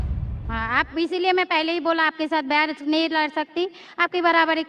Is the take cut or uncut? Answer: uncut